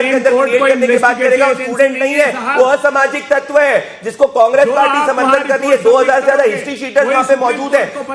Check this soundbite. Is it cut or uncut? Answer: uncut